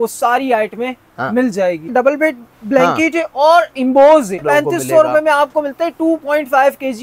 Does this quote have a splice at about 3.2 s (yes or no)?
no